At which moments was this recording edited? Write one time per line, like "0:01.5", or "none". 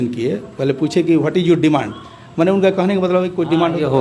none